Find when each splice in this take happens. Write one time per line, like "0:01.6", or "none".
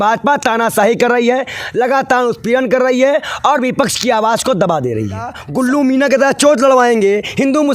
0:05.4